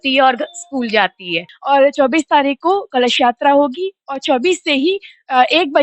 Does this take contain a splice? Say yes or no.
yes